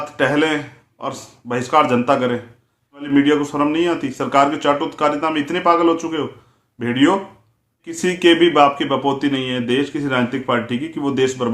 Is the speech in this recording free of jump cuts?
no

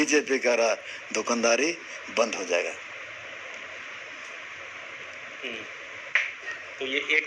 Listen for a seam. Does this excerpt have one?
no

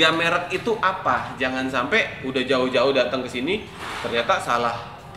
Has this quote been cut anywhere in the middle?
no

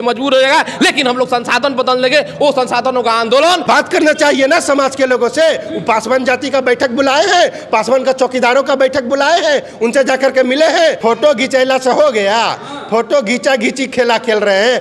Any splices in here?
yes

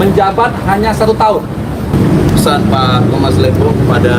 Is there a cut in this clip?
yes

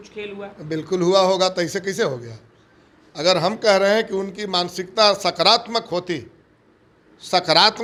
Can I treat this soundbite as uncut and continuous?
yes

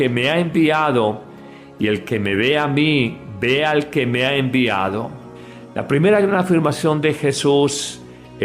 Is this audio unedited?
no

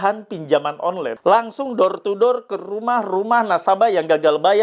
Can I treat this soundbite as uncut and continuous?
no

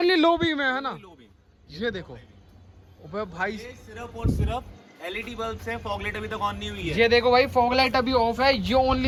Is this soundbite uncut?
yes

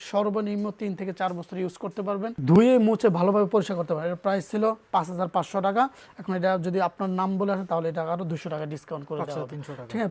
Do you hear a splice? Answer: no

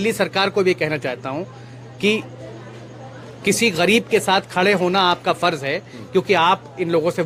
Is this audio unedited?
yes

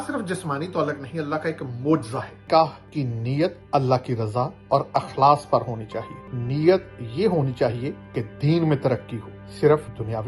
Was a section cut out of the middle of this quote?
yes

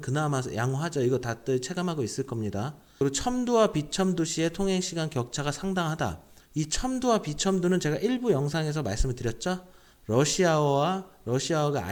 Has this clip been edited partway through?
no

